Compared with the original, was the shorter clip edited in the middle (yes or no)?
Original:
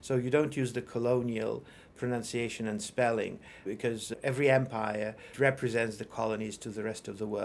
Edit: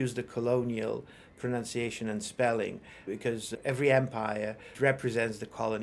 no